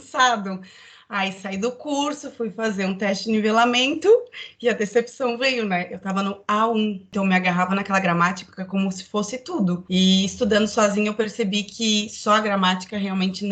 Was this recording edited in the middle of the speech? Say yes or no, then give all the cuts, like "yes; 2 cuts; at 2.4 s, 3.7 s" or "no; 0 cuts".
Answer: yes; 2 cuts; at 7.1 s, 9.8 s